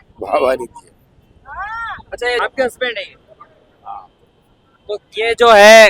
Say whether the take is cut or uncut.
cut